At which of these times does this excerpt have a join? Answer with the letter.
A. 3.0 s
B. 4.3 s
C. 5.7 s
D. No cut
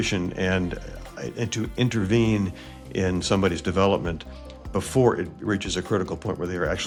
D